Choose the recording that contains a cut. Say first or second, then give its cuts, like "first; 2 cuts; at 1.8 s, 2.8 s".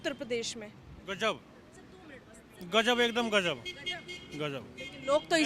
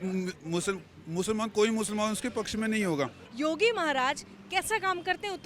second; 1 cut; at 3.2 s